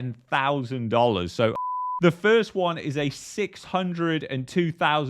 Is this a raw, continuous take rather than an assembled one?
no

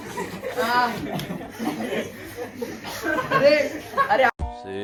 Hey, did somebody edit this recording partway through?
no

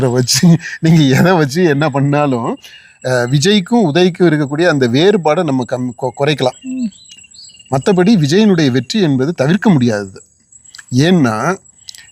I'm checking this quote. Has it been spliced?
no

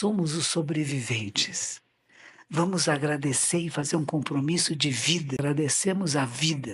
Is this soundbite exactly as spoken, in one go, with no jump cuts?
no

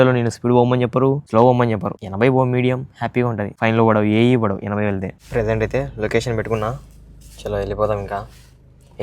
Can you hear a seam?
yes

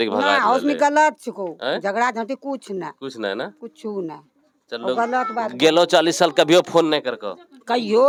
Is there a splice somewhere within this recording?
no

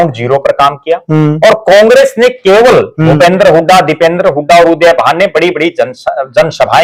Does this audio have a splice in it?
no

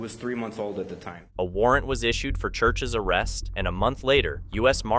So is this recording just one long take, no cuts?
yes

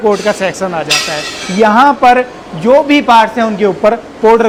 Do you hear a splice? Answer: no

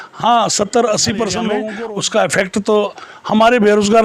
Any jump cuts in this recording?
yes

